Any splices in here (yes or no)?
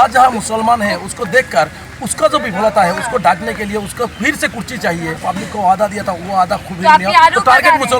yes